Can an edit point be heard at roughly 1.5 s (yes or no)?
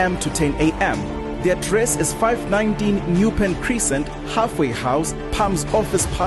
no